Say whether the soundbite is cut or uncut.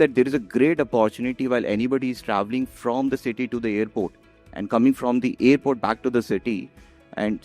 uncut